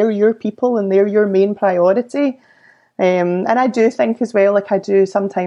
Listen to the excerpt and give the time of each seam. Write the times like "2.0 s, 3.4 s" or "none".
none